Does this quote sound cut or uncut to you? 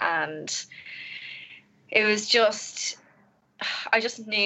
uncut